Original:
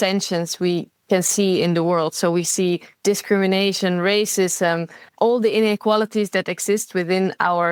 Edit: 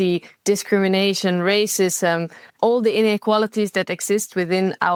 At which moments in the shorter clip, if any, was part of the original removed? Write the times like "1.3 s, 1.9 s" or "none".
none